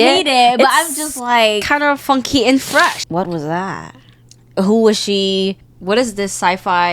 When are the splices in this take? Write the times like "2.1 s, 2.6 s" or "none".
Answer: 3.0 s, 4.4 s, 5.7 s